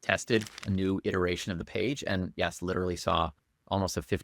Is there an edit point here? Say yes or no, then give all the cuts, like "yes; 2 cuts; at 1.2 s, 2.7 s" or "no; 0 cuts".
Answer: no; 0 cuts